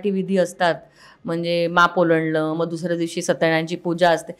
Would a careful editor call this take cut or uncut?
uncut